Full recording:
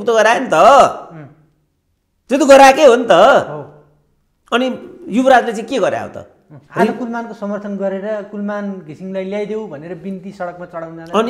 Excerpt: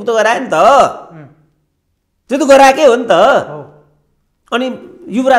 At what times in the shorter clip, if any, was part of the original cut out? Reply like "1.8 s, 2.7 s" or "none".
none